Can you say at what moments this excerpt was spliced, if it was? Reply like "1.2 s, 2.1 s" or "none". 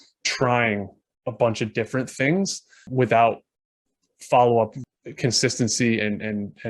2.9 s, 4.9 s